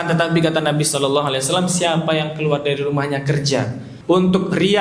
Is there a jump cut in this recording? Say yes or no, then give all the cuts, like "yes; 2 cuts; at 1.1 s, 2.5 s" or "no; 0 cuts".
yes; 1 cut; at 3.8 s